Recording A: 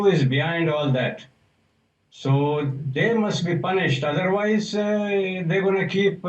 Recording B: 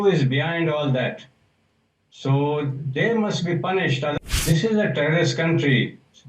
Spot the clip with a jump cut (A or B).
B